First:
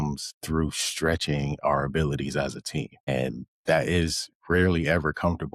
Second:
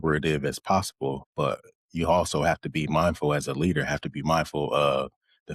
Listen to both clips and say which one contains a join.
second; 1 cut; at 1.2 s

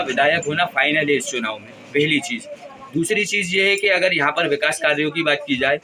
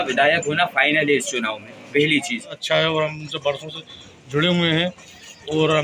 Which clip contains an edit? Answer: second; 1 cut; at 2.6 s

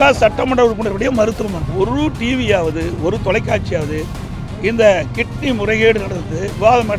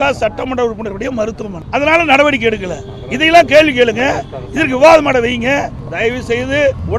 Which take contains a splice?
first; 1 cut; at 1.6 s

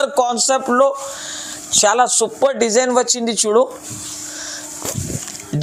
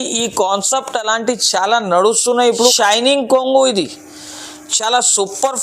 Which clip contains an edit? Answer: second; 1 cut; at 2.8 s

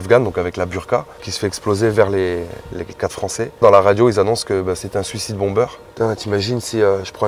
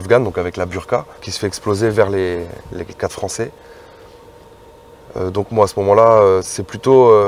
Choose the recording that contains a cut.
first; 2 cuts; at 3.6 s, 5.8 s

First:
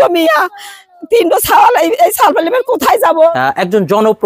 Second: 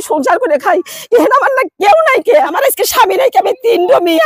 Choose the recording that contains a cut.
first; 1 cut; at 3.3 s

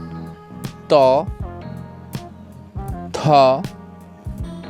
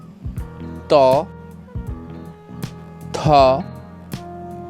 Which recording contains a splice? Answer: second; 2 cuts; at 1.7 s, 3.1 s

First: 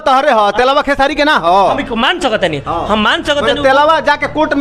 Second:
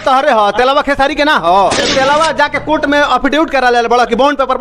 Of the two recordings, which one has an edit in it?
second; 1 cut; at 1.8 s

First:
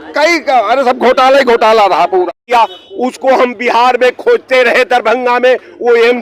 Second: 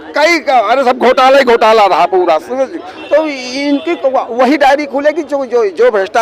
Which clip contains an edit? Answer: first; 1 cut; at 2.4 s

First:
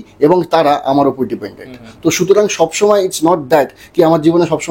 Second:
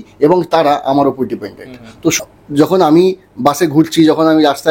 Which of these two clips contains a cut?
second; 1 cut; at 2.1 s

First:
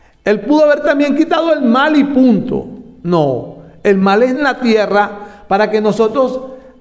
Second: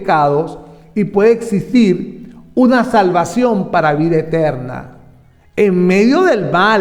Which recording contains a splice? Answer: first; 1 cut; at 4.4 s

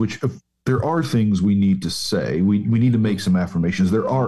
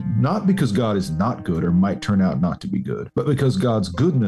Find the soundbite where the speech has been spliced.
second; 1 cut; at 3.0 s

